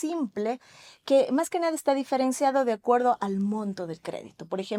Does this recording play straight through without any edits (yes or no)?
yes